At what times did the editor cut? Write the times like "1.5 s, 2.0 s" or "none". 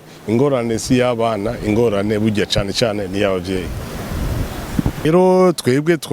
5.0 s